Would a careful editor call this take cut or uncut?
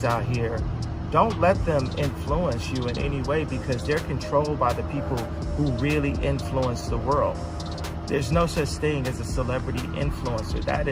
uncut